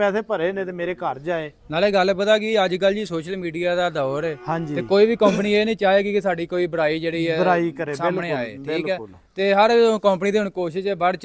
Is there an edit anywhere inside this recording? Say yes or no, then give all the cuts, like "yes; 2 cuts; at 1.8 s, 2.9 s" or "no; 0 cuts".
yes; 1 cut; at 1.6 s